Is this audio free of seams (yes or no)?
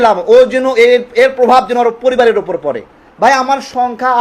no